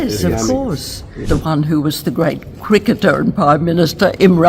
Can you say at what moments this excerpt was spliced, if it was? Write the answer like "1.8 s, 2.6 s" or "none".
1.2 s